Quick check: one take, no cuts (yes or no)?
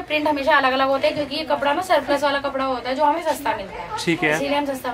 yes